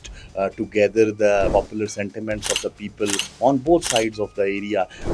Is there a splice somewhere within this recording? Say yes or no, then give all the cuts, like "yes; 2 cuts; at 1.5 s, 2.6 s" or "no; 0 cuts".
yes; 1 cut; at 1.5 s